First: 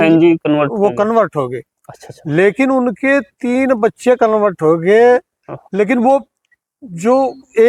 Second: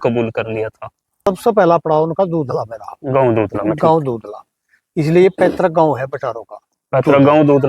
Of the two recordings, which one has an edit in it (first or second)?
second